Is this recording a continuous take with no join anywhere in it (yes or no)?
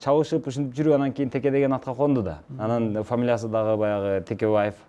yes